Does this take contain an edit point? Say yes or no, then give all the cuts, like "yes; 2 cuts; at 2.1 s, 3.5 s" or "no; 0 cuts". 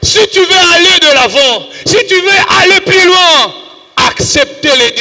no; 0 cuts